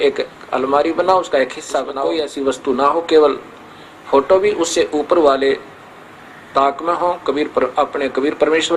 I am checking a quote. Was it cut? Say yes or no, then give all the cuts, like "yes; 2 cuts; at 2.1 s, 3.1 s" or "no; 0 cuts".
yes; 1 cut; at 2.0 s